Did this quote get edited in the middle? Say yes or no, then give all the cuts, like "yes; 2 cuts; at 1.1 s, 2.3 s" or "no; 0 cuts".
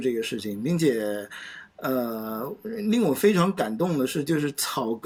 no; 0 cuts